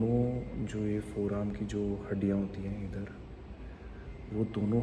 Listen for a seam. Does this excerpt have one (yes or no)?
no